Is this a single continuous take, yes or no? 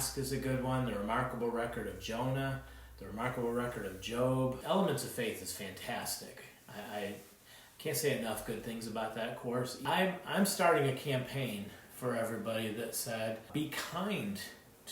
no